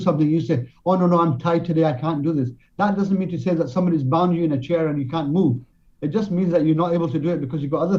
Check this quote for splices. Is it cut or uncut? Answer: uncut